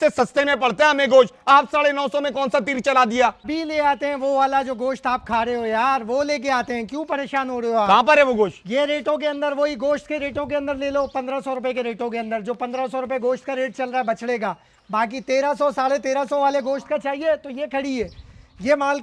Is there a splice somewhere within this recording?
yes; 1 cut; at 3.5 s

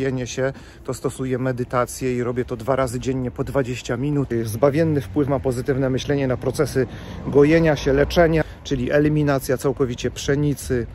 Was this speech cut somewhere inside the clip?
yes; 2 cuts; at 4.3 s, 8.4 s

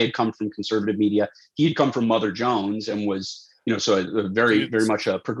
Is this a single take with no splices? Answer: yes; 0 cuts

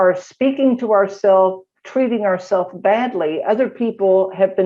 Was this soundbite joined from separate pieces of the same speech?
no; 0 cuts

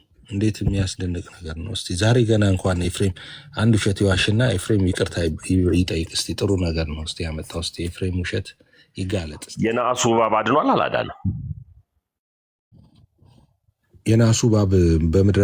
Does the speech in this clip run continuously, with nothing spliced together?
no; 1 cut; at 9.4 s

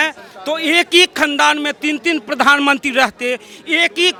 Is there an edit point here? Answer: no; 0 cuts

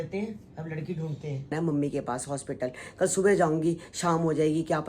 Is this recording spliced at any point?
yes; 1 cut; at 1.5 s

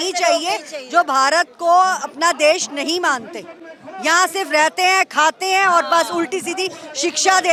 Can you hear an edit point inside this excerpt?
no; 0 cuts

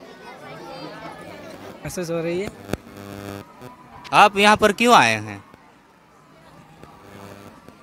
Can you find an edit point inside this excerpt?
yes; 1 cut; at 1.9 s

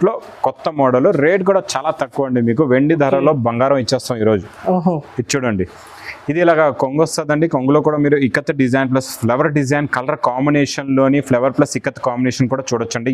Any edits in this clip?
no; 0 cuts

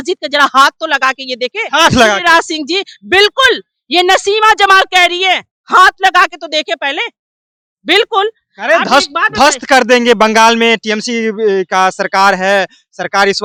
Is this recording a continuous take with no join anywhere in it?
yes; 0 cuts

